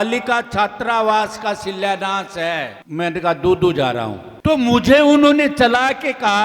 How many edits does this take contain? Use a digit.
2